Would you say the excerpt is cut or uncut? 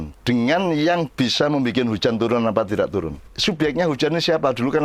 cut